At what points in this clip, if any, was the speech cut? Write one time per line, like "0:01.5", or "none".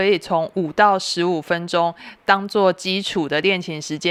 none